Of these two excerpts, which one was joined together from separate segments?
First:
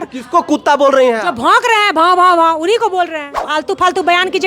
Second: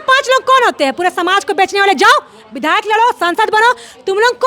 first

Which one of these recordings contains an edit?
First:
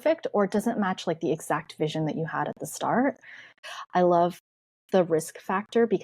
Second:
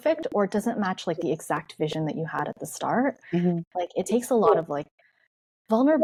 first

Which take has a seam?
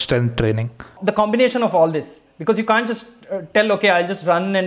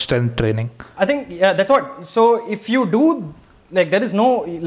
first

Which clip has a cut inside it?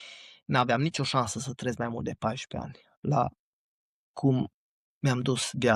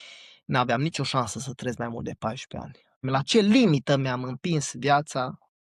second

